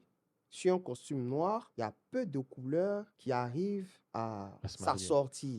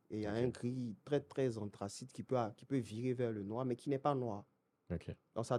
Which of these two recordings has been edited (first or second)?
first